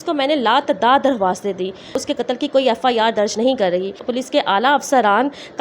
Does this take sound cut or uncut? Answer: cut